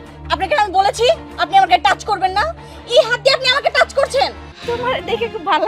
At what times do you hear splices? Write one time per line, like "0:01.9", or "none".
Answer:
0:04.5